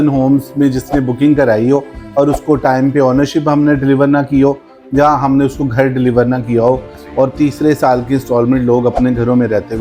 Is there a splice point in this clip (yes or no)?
yes